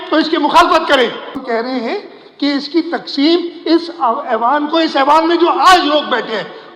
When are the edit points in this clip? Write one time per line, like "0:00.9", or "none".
0:01.4

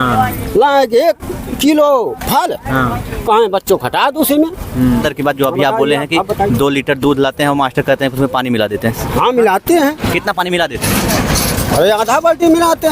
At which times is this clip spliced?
0:05.0

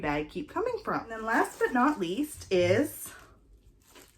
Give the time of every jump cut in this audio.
0:01.2

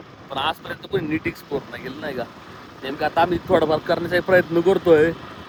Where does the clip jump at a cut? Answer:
none

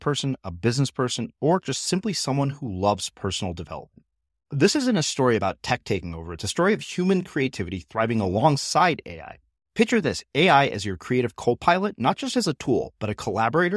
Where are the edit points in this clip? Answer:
none

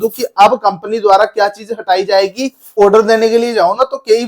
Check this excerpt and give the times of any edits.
0:02.7

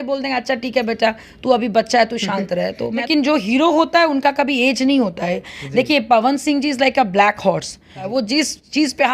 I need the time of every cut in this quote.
0:03.0
0:08.1

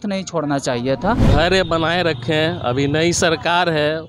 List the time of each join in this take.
0:01.3

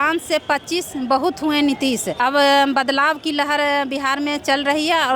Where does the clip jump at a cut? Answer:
0:02.1

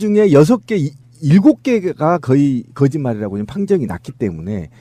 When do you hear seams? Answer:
0:01.8

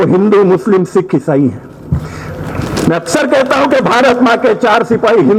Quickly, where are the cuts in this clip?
none

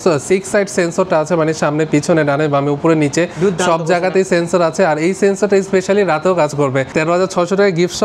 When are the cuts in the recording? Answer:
0:06.9

